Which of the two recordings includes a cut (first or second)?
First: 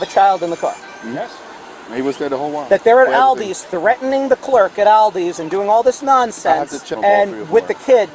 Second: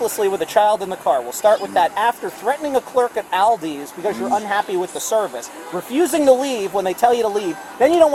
first